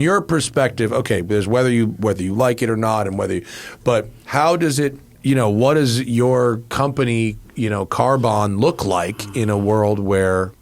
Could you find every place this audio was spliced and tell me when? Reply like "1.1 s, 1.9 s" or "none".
5.1 s